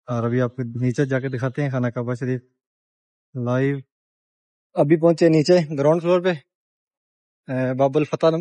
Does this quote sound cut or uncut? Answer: uncut